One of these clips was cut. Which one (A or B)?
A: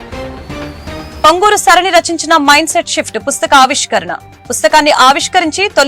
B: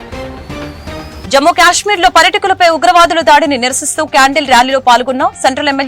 A